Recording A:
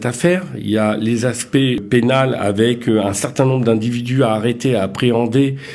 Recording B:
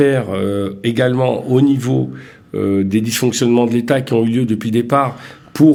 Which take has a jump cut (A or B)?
A